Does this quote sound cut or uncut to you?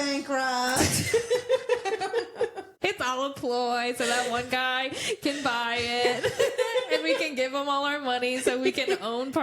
cut